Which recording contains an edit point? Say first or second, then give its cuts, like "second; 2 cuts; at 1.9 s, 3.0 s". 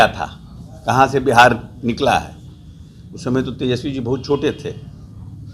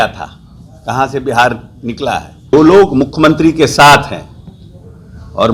second; 1 cut; at 2.5 s